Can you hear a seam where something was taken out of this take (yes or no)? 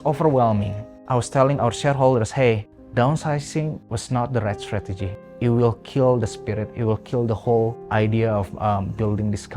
no